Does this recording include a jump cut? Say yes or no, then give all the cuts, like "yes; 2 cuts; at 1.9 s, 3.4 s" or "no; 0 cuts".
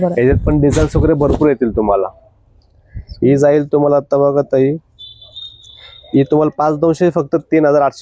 no; 0 cuts